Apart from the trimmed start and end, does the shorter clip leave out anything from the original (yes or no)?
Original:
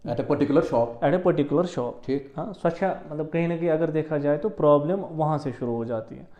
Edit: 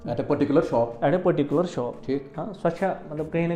no